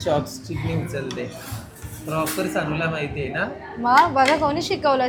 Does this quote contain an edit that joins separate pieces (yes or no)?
no